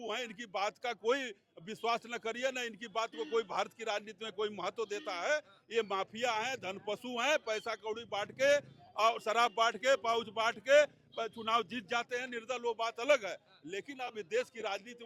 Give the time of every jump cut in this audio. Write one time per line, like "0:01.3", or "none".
none